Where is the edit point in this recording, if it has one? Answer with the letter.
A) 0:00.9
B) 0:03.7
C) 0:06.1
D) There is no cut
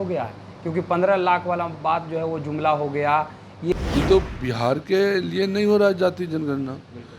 B